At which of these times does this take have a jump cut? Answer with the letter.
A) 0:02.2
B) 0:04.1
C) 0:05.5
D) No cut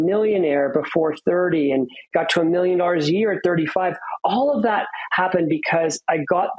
D